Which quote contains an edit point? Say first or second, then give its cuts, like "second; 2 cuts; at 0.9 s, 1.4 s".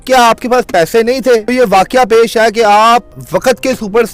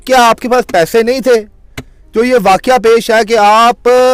first; 2 cuts; at 1.5 s, 3.1 s